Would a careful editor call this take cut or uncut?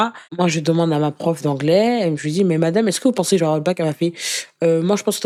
uncut